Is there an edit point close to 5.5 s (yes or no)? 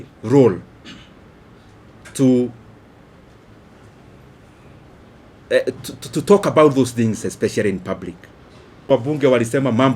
no